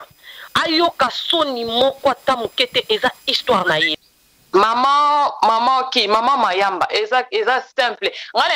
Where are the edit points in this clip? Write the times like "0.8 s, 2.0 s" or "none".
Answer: 3.9 s